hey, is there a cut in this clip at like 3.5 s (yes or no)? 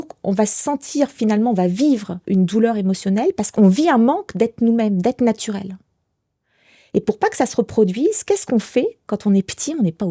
yes